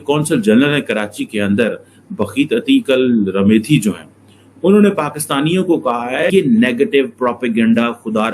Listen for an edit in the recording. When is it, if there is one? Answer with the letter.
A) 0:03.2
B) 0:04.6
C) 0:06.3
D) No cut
C